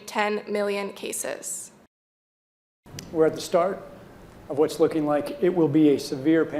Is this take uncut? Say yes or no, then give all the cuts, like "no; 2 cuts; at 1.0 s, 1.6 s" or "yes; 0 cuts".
no; 1 cut; at 2.2 s